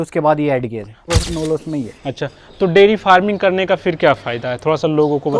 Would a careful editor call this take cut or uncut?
cut